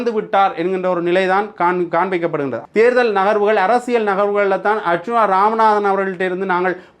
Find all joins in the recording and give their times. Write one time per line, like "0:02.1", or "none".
0:02.6